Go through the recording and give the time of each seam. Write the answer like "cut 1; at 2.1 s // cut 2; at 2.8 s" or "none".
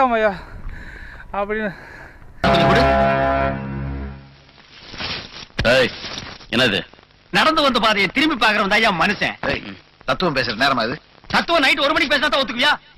none